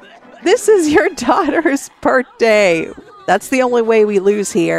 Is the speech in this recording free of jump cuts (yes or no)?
no